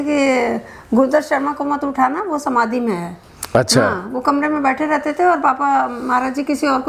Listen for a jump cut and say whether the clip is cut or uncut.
uncut